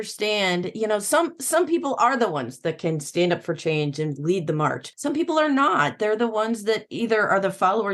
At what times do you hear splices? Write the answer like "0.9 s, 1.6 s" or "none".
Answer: 4.9 s